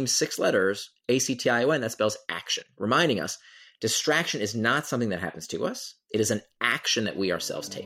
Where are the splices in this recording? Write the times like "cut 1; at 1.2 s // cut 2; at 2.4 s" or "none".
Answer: none